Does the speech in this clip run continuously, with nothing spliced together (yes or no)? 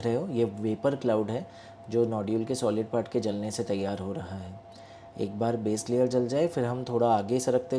yes